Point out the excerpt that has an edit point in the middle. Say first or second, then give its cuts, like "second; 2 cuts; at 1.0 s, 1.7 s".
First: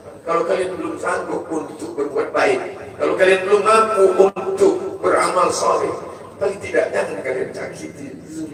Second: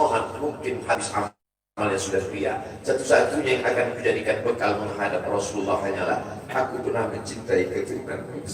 second; 1 cut; at 0.9 s